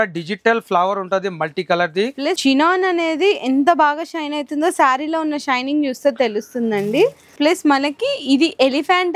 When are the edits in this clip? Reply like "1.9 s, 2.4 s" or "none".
2.4 s, 7.4 s